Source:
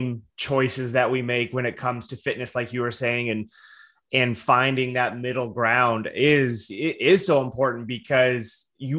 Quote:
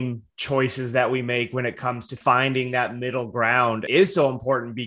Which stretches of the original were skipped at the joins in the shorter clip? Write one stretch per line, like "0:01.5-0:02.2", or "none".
0:02.2-0:04.4
0:06.1-0:07.0